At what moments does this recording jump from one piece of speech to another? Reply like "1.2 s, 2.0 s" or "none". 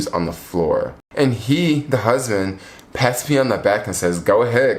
1.0 s

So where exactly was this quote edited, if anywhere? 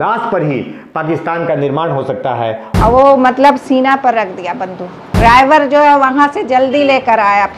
2.6 s, 5.0 s

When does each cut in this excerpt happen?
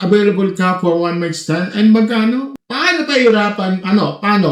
2.6 s

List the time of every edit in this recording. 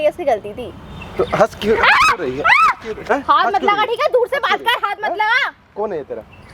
none

